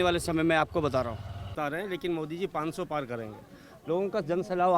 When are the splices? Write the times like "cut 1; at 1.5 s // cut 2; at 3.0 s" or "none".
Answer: cut 1; at 1.5 s